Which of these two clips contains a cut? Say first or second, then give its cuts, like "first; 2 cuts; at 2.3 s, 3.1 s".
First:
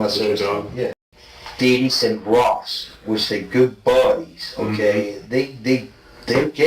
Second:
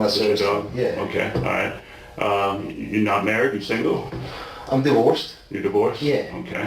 first; 1 cut; at 0.9 s